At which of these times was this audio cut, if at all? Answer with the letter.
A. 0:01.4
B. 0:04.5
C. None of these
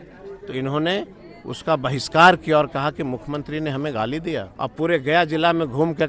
B